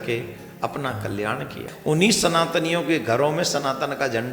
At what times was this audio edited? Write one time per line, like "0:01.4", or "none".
0:01.7